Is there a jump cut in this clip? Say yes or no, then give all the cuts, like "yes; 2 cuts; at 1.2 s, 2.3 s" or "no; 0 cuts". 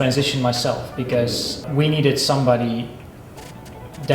yes; 1 cut; at 1.6 s